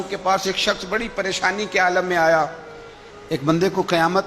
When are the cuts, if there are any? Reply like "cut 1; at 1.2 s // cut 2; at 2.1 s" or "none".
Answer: cut 1; at 3.1 s